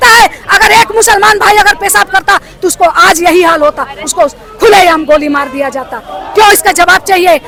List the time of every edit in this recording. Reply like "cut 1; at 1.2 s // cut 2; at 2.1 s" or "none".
none